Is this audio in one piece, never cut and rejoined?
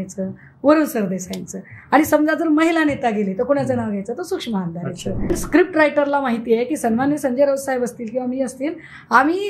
no; 1 cut; at 5.3 s

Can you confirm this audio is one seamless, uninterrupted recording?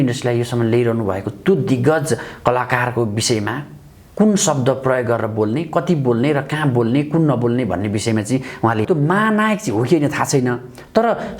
no; 1 cut; at 8.8 s

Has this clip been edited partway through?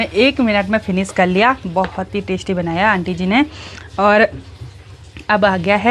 no; 0 cuts

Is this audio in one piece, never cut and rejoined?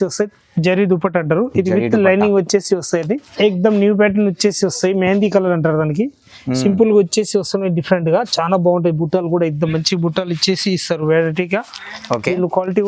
no; 1 cut; at 3.3 s

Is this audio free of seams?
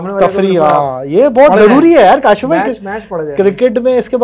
yes; 0 cuts

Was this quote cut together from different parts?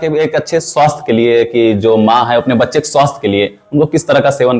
no; 0 cuts

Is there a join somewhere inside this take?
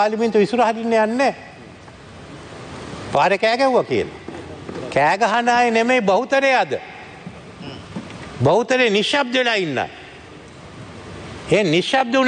no; 0 cuts

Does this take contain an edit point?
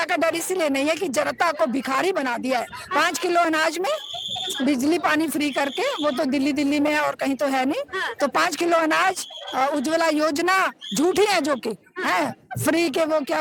no; 0 cuts

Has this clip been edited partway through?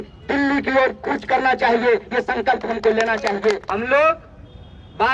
yes; 1 cut; at 3.7 s

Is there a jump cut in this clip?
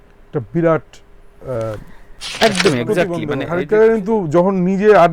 yes; 1 cut; at 3.4 s

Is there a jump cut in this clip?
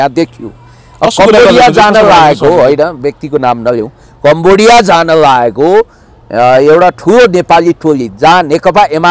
no; 0 cuts

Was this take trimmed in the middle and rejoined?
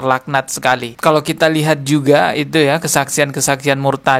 yes; 1 cut; at 0.9 s

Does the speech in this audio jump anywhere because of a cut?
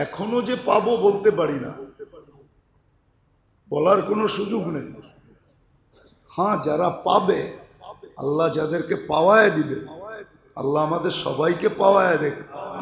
no; 0 cuts

